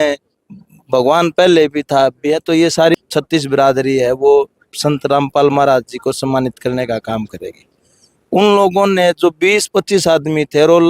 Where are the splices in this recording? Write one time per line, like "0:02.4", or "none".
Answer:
0:03.0